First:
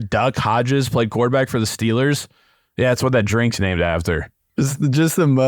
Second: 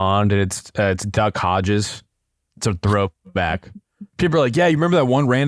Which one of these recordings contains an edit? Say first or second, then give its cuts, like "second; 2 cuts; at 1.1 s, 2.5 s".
first; 1 cut; at 4.4 s